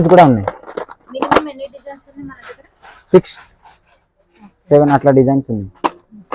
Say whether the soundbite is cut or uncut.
uncut